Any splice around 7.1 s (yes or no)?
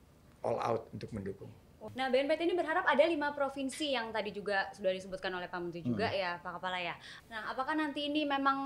yes